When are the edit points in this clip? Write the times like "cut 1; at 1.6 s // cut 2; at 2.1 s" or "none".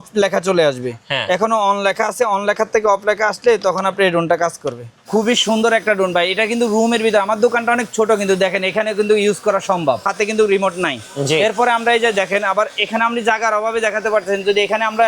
cut 1; at 5.0 s // cut 2; at 10.1 s